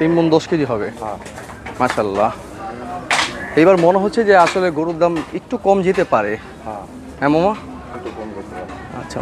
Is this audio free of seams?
yes; 0 cuts

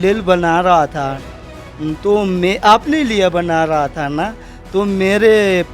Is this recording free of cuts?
yes; 0 cuts

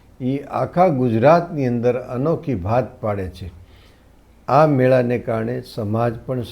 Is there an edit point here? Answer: no; 0 cuts

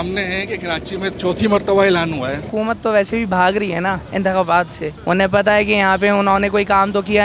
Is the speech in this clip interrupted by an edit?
yes; 3 cuts; at 2.5 s, 4.0 s, 4.9 s

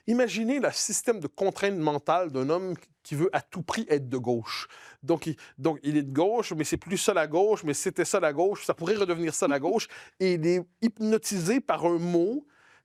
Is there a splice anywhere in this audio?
no; 0 cuts

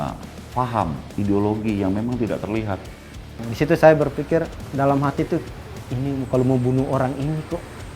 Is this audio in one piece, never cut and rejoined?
no; 2 cuts; at 3.4 s, 4.6 s

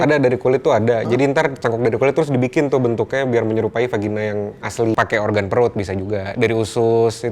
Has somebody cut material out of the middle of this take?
yes; 1 cut; at 4.9 s

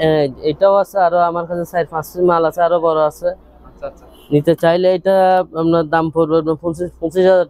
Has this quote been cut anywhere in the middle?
no; 0 cuts

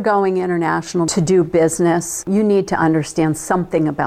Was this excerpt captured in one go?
no; 1 cut; at 2.1 s

